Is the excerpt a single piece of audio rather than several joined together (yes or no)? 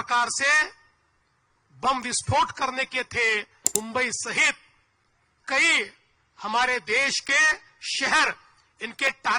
no